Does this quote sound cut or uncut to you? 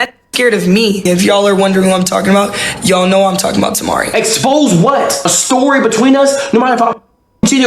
cut